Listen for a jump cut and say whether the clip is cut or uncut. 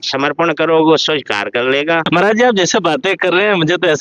cut